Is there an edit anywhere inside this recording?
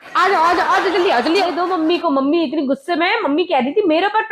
yes; 1 cut; at 1.3 s

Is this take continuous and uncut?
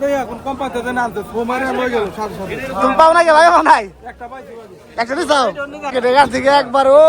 no; 1 cut; at 5.9 s

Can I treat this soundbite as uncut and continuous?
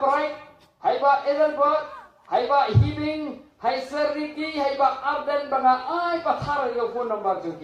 yes; 0 cuts

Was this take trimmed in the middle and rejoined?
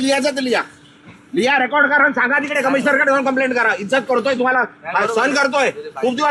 no; 0 cuts

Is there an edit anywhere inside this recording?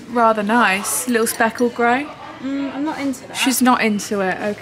no; 0 cuts

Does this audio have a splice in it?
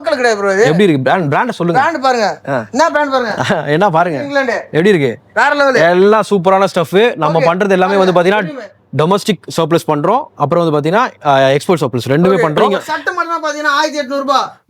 yes; 1 cut; at 12.7 s

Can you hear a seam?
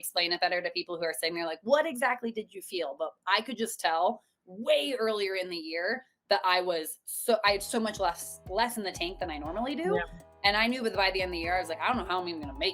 no; 0 cuts

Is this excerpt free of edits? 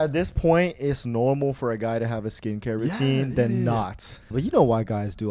no; 1 cut; at 4.3 s

